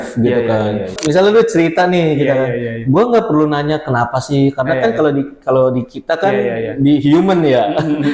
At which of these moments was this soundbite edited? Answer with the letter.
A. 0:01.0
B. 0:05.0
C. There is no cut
A